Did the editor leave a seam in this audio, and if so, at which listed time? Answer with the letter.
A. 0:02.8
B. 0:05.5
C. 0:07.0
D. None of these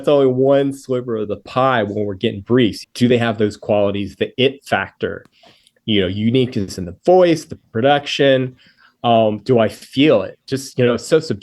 A